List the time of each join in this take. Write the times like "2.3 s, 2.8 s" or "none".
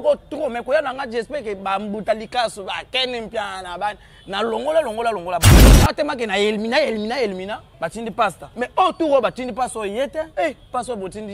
5.5 s, 8.0 s, 10.3 s